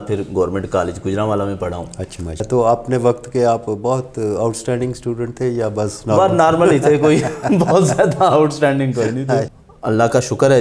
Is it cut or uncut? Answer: cut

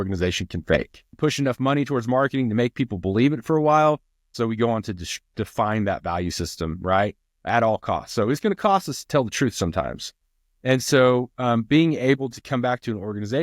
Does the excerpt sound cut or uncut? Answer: cut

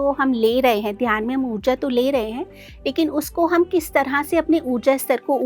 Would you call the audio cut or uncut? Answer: uncut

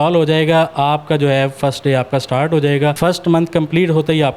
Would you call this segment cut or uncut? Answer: cut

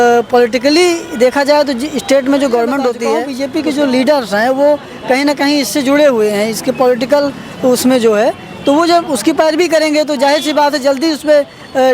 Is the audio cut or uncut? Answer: cut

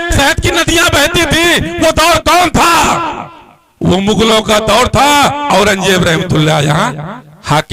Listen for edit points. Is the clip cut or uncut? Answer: cut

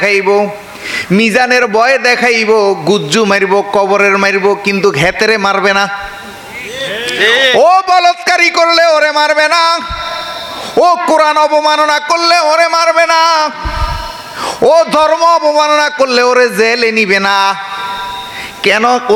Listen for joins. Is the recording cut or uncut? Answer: uncut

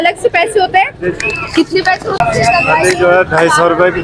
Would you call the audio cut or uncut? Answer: uncut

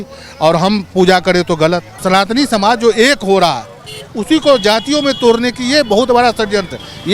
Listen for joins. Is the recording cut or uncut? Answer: cut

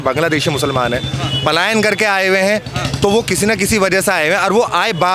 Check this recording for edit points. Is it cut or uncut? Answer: uncut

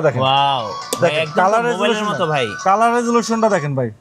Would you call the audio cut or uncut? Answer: uncut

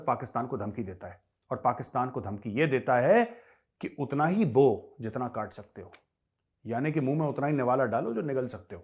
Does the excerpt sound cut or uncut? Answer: uncut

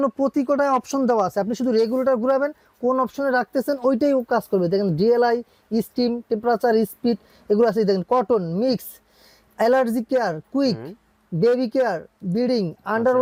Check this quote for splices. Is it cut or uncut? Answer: uncut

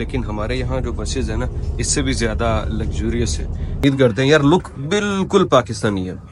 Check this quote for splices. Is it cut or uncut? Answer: cut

